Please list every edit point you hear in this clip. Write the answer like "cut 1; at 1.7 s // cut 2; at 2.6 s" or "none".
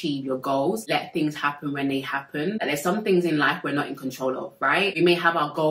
cut 1; at 0.8 s // cut 2; at 2.6 s // cut 3; at 5.0 s